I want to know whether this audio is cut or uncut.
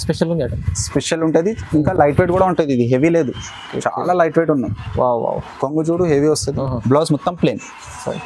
uncut